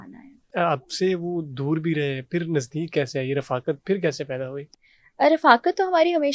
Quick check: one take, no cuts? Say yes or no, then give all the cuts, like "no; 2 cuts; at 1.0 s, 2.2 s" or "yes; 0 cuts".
yes; 0 cuts